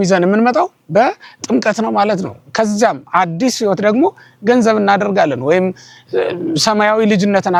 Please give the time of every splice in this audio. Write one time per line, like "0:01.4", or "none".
none